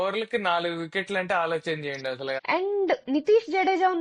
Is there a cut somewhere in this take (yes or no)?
yes